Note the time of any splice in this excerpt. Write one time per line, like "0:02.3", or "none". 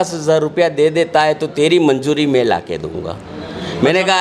none